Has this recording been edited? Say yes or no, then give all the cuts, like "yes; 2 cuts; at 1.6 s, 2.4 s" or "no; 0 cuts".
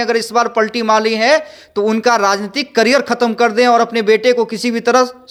no; 0 cuts